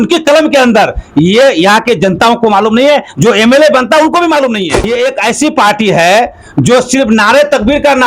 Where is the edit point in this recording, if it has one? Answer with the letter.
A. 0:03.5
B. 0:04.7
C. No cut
B